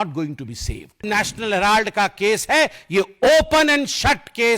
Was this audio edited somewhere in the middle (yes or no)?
yes